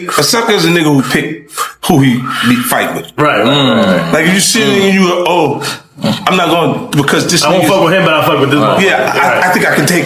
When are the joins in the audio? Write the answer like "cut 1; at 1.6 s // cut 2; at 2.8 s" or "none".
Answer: none